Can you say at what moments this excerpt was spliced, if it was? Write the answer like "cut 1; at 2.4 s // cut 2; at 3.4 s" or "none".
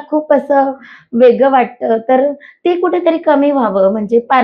none